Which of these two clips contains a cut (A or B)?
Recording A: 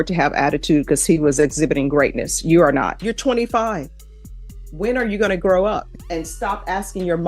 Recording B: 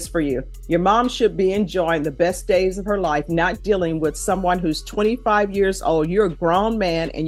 A